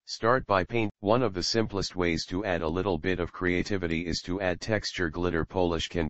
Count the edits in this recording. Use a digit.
1